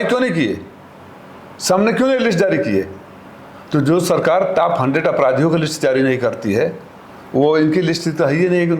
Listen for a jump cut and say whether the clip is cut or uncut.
uncut